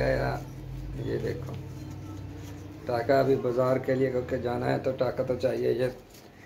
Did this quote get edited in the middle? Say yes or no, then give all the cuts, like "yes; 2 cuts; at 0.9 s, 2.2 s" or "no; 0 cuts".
no; 0 cuts